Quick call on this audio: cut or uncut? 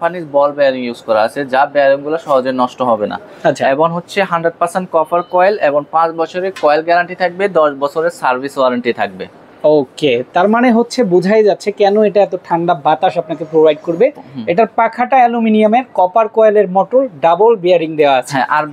uncut